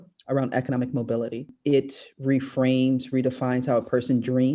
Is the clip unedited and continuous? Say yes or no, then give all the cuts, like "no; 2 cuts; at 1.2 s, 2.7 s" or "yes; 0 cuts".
no; 1 cut; at 1.5 s